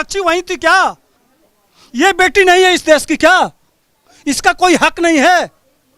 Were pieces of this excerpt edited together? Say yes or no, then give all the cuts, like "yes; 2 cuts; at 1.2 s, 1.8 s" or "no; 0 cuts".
no; 0 cuts